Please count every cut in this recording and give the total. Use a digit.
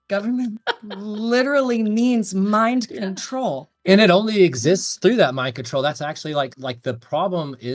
1